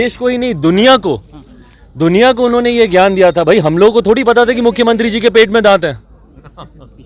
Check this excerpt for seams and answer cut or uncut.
uncut